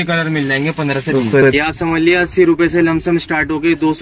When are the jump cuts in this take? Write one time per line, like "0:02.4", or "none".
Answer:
0:01.4